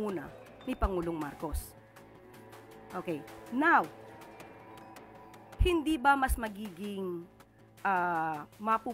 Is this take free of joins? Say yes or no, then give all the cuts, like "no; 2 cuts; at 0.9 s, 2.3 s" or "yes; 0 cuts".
yes; 0 cuts